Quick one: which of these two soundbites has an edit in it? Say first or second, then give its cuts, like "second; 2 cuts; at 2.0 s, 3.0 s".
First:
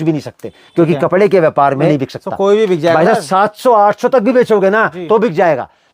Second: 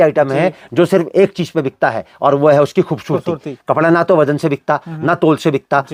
first; 1 cut; at 1.9 s